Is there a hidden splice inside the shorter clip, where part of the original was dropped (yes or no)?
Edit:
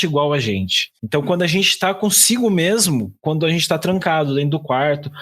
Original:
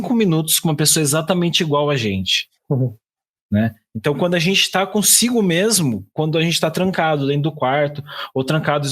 yes